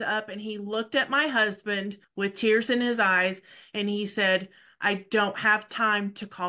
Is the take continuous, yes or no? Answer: no